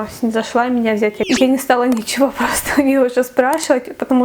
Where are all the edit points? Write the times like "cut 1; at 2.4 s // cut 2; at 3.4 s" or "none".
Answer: cut 1; at 1.2 s